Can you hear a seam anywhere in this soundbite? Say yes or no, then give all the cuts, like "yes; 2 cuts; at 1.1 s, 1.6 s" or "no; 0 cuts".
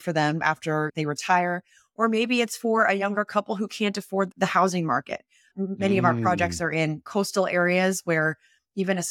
no; 0 cuts